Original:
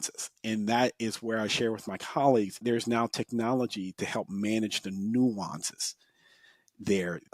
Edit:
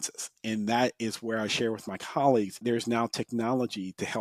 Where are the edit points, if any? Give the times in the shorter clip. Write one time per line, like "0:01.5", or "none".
none